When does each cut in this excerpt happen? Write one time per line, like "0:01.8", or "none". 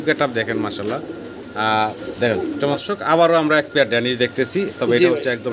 0:02.8